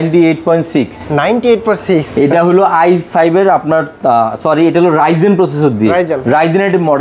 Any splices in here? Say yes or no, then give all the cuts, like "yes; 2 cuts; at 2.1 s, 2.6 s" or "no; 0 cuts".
no; 0 cuts